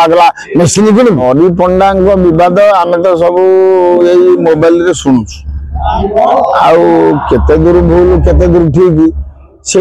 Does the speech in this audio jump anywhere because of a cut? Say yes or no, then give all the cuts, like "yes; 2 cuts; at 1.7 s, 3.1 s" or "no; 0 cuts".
yes; 1 cut; at 1.2 s